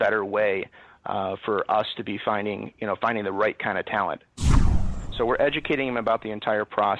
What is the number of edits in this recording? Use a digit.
1